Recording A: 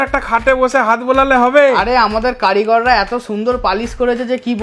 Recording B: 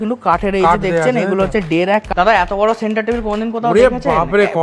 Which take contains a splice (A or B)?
B